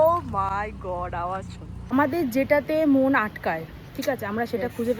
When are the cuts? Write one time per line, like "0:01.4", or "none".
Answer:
0:01.8